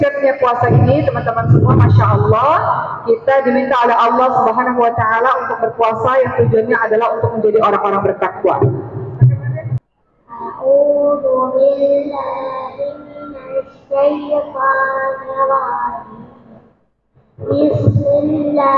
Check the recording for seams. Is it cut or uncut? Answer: cut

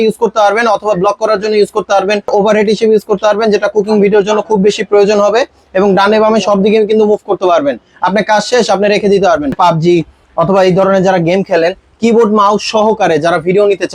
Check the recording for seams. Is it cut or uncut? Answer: cut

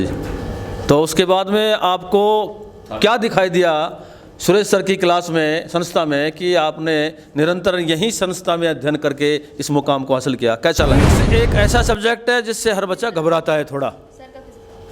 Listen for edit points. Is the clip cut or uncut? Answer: cut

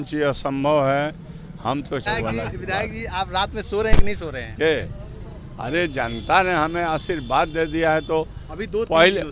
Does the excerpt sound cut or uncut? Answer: cut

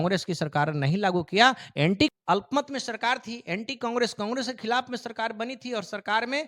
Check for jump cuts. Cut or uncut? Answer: cut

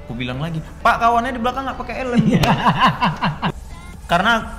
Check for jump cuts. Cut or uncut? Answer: cut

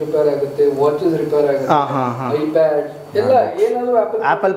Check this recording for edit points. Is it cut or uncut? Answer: uncut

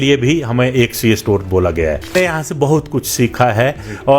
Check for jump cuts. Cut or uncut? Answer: cut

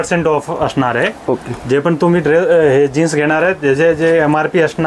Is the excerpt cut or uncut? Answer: uncut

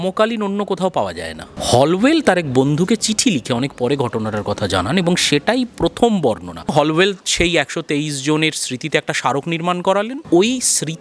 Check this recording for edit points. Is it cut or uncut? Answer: cut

